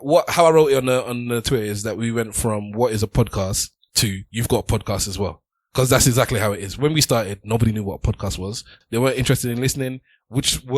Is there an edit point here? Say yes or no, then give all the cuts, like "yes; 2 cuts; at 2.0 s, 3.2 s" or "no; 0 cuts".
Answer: yes; 1 cut; at 8.8 s